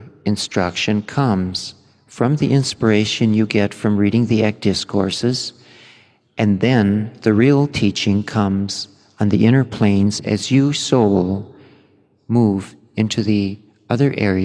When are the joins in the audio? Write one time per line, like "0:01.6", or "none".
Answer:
none